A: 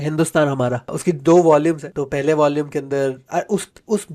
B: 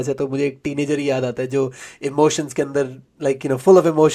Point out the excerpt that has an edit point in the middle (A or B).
A